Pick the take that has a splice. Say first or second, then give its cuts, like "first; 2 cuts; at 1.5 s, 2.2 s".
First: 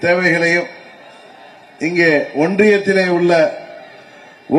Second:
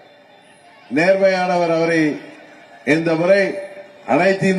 first; 1 cut; at 2.9 s